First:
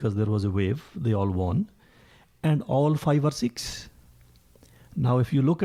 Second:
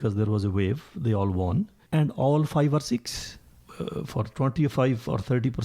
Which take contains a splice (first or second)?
second